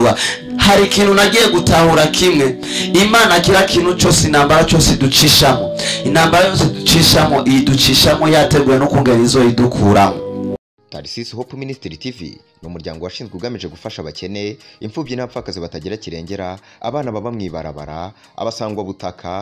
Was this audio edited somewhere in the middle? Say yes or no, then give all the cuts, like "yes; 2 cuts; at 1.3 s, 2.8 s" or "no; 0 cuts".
yes; 1 cut; at 10.6 s